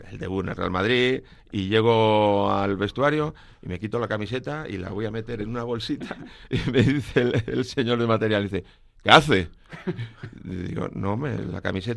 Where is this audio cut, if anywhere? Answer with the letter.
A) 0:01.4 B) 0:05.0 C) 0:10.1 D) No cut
A